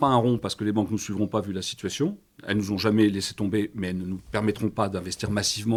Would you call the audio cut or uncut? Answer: uncut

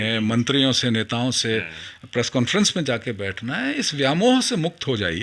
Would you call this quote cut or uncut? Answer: uncut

